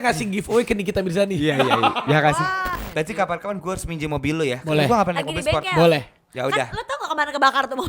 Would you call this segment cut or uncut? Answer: cut